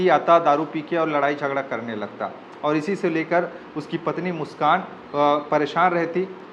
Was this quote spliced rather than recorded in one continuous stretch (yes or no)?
no